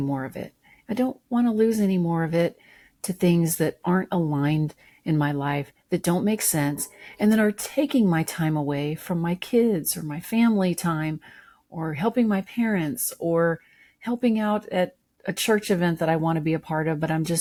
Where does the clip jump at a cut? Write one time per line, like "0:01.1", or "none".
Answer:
none